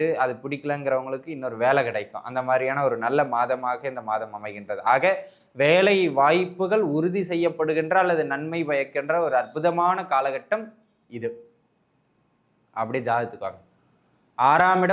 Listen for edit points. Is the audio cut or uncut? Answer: uncut